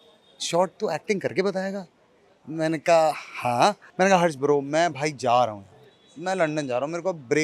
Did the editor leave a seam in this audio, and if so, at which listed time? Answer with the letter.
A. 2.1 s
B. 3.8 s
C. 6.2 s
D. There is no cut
B